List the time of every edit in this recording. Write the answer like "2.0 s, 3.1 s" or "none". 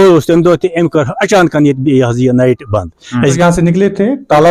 3.4 s